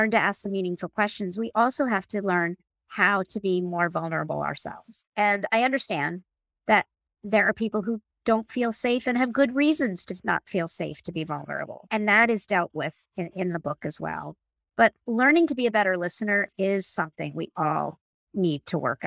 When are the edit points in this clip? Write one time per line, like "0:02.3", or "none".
none